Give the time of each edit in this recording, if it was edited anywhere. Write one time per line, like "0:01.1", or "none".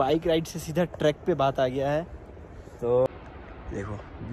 0:03.1